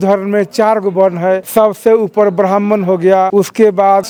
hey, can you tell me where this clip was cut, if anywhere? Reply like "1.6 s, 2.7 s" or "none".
none